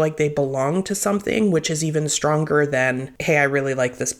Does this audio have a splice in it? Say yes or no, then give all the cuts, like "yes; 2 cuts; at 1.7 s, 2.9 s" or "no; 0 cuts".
yes; 1 cut; at 3.1 s